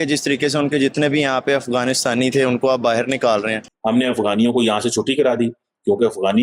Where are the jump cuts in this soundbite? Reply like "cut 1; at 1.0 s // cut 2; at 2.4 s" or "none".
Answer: cut 1; at 3.6 s